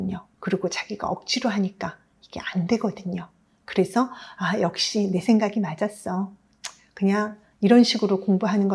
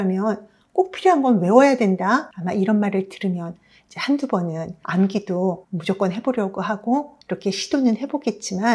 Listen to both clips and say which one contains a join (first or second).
second